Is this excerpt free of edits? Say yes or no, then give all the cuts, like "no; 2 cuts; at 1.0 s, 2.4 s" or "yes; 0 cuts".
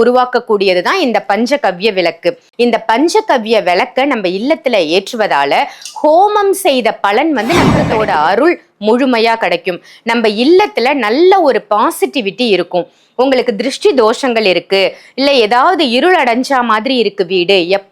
no; 2 cuts; at 2.5 s, 7.8 s